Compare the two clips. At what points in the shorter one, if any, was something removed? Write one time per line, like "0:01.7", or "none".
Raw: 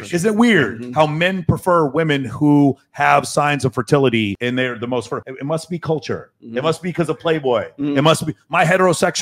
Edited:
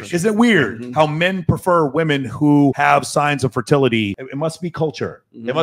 0:02.8
0:04.2